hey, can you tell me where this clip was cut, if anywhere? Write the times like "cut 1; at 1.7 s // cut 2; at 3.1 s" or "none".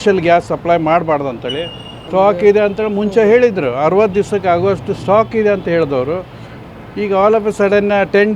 cut 1; at 1.9 s